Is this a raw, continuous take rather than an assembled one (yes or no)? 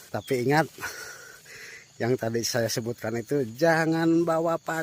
yes